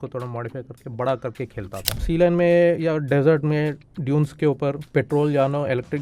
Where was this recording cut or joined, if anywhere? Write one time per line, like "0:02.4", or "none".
0:02.0